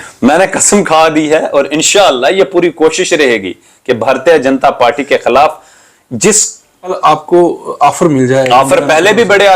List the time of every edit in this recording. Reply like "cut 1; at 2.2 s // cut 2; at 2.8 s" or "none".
cut 1; at 7.0 s